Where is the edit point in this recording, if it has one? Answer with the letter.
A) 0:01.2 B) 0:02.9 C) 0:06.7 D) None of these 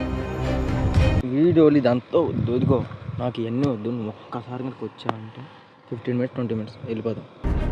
A